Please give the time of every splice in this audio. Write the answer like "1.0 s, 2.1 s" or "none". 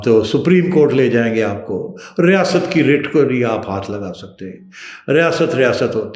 none